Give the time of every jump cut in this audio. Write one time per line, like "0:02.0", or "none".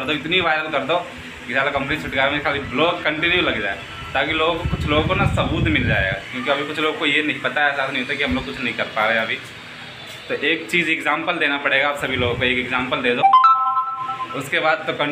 none